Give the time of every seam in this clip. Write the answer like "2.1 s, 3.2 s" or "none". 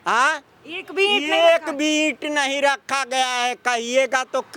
none